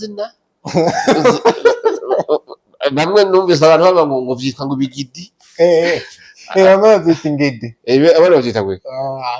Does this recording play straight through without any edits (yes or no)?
yes